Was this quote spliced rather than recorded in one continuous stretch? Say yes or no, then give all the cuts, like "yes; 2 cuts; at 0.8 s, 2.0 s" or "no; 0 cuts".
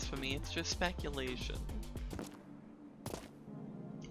yes; 1 cut; at 2.1 s